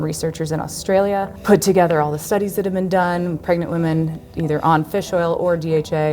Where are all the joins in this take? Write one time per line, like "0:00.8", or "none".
0:01.3